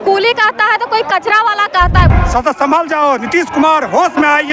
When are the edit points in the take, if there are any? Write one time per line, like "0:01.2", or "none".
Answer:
0:02.1